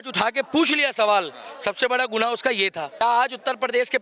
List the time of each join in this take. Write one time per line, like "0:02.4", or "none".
0:03.0